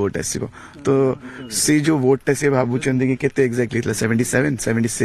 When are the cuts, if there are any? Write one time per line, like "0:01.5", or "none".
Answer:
none